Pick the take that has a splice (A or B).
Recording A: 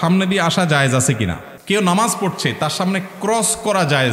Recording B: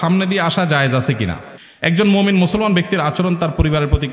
B